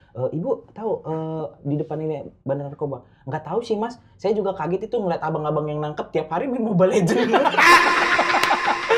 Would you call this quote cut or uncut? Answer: uncut